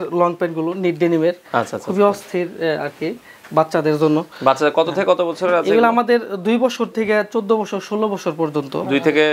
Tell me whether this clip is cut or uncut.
uncut